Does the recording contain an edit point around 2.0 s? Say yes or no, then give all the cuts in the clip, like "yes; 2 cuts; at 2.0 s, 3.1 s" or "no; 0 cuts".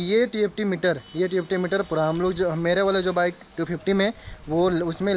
no; 0 cuts